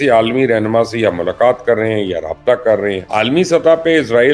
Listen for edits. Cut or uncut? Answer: cut